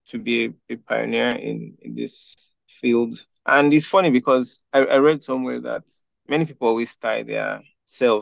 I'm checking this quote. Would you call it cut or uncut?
uncut